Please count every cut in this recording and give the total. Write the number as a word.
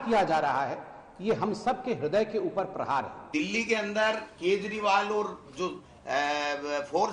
one